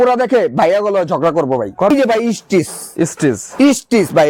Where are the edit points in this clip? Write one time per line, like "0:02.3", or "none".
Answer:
0:01.9